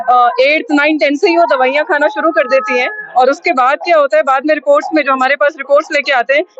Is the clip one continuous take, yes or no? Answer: yes